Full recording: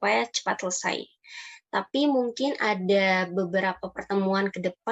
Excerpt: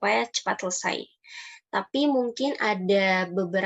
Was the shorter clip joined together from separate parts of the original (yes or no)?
no